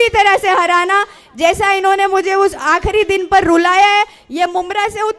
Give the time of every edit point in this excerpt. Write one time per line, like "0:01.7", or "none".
none